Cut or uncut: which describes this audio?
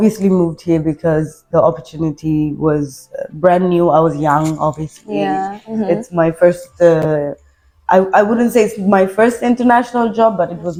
uncut